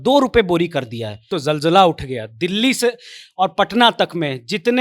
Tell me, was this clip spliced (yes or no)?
yes